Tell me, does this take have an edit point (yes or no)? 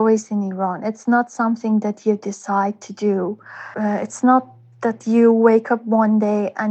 no